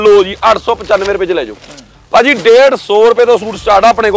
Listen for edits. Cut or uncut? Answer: uncut